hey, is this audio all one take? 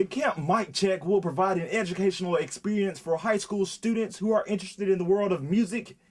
yes; 0 cuts

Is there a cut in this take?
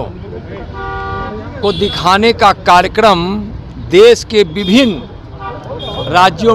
no; 0 cuts

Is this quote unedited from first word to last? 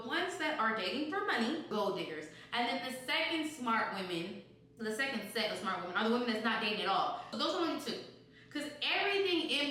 no; 2 cuts; at 1.7 s, 7.3 s

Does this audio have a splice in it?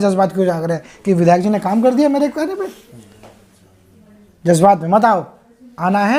no; 0 cuts

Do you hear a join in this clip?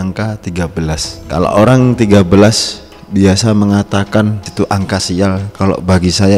yes; 2 cuts; at 1.1 s, 4.5 s

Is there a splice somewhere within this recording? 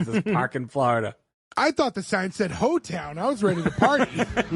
no; 0 cuts

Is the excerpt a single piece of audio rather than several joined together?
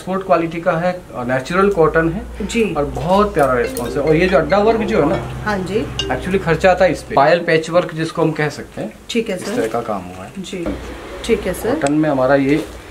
no; 2 cuts; at 7.1 s, 10.7 s

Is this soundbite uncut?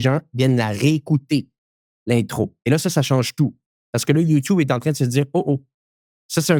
yes; 0 cuts

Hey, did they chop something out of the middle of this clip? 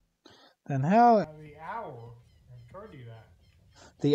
yes; 1 cut; at 1.3 s

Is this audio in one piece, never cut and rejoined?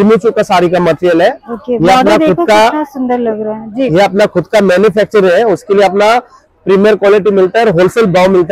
yes; 0 cuts

